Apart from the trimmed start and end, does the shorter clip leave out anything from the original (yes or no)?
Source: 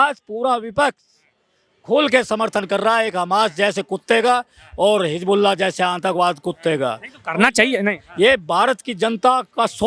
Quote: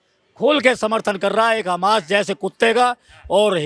no